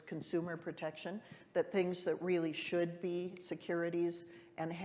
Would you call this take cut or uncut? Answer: uncut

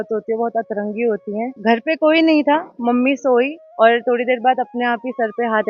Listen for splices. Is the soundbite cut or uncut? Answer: cut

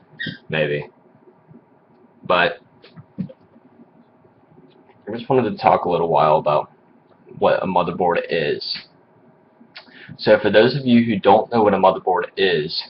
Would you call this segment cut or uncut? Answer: uncut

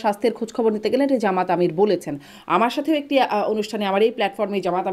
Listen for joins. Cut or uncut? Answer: uncut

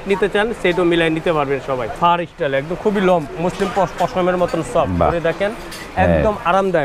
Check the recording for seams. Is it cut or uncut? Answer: cut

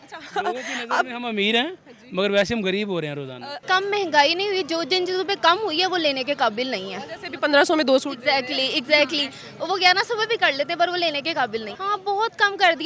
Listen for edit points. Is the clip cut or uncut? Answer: cut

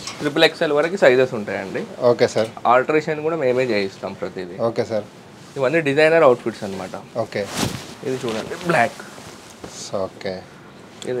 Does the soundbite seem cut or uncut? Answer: uncut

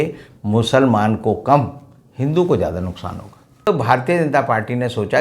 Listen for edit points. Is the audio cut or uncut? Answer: cut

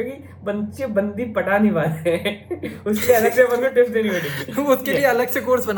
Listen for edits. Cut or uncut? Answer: uncut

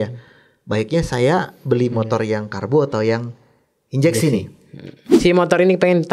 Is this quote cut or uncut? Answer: cut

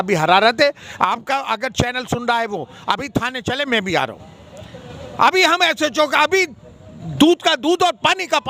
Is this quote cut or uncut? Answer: uncut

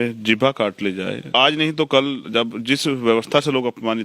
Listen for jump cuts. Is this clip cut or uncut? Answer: cut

